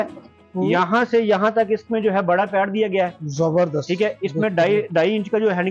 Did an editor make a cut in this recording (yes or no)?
no